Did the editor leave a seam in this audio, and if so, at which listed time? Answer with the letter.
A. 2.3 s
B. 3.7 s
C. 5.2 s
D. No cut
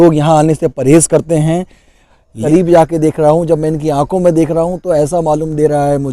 A